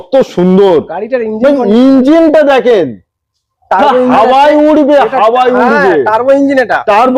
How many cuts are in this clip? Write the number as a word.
zero